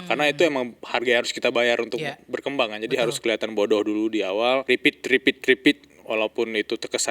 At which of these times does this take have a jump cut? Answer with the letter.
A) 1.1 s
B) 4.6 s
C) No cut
B